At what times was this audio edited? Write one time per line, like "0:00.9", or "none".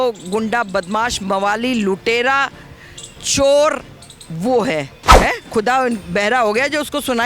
0:05.0